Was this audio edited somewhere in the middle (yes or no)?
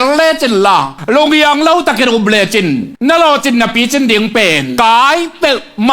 yes